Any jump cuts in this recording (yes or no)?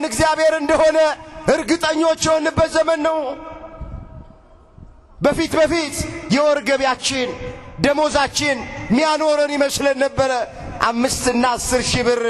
no